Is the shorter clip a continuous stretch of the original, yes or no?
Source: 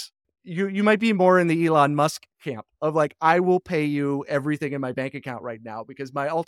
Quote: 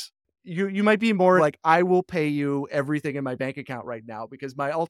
no